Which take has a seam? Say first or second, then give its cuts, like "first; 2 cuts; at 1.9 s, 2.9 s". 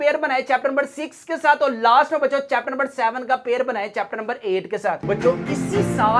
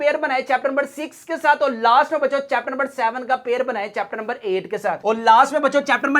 first; 1 cut; at 5.0 s